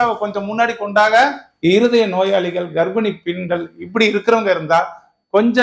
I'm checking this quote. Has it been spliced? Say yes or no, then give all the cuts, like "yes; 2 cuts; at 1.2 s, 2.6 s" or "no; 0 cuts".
yes; 1 cut; at 1.4 s